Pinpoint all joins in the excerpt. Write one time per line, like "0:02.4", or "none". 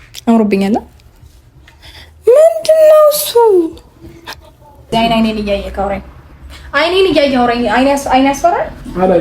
0:04.9